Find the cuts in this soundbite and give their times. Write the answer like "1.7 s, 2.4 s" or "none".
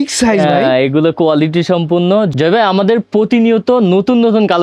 2.3 s